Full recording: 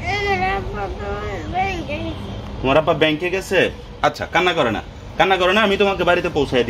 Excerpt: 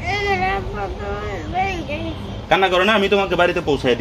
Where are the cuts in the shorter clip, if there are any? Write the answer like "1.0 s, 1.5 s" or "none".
2.3 s